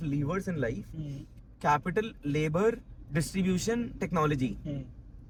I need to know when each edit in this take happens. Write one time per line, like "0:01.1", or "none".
none